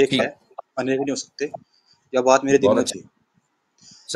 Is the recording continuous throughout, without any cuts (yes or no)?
yes